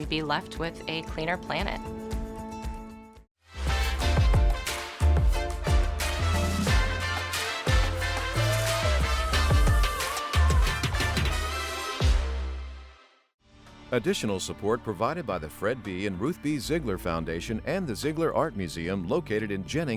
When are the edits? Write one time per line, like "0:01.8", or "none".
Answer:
0:13.7

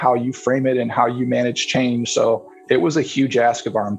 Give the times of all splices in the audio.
0:02.6

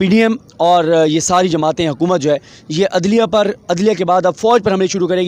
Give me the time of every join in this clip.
none

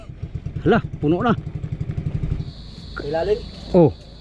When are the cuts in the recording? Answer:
0:02.5

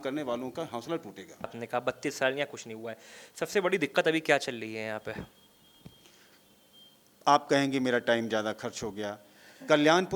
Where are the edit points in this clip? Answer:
0:01.6

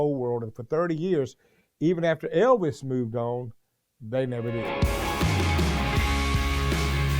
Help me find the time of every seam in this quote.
0:04.6

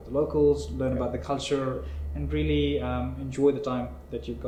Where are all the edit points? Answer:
none

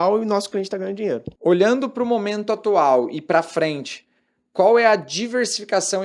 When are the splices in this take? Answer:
0:01.3

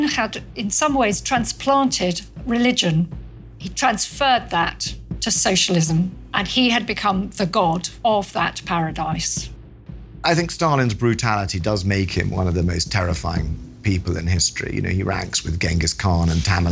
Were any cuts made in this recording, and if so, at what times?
0:03.2
0:09.5

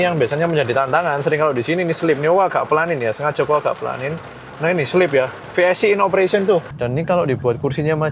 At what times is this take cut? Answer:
0:06.7

